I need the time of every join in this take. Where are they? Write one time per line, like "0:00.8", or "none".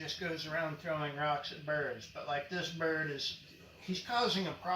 none